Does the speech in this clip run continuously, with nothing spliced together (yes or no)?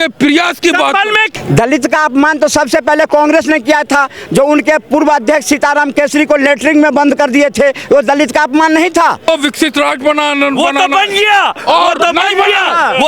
no